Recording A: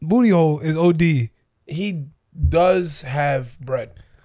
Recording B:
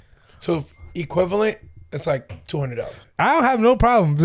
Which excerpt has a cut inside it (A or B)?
B